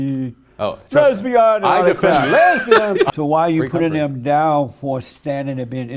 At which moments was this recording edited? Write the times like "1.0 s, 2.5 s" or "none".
3.1 s